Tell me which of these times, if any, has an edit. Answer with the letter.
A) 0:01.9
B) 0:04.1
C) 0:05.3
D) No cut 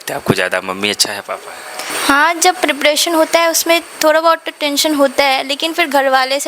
A